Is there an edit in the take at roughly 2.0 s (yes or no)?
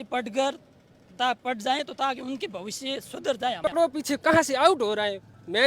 no